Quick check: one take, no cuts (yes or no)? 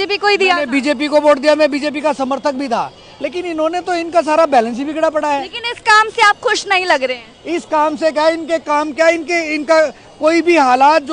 yes